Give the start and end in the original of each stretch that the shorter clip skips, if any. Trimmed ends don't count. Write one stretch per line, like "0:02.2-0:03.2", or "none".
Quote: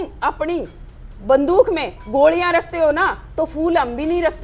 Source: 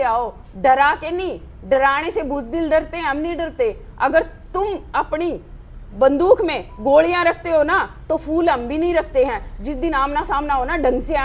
none